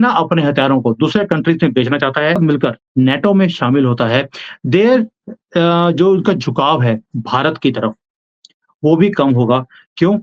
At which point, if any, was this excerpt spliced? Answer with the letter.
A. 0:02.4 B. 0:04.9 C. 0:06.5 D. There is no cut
A